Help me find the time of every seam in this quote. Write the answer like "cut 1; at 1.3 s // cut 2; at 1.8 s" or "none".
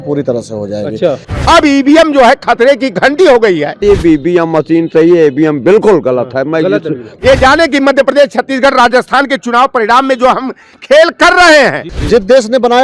cut 1; at 1.3 s // cut 2; at 3.8 s // cut 3; at 7.0 s // cut 4; at 11.9 s